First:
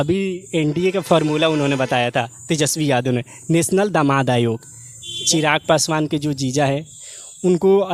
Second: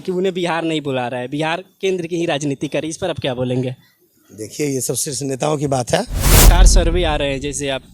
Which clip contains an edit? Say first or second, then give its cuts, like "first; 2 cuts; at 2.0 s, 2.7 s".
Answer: second; 1 cut; at 6.5 s